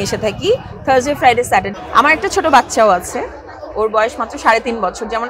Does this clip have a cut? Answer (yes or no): yes